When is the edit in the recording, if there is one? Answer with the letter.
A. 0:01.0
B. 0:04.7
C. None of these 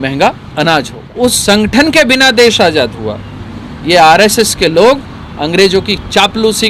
A